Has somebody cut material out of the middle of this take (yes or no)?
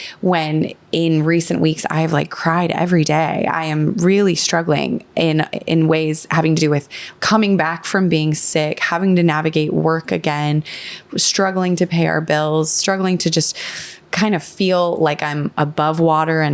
no